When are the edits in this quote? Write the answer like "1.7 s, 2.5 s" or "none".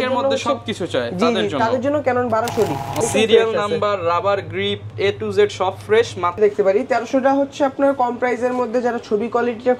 3.0 s, 6.4 s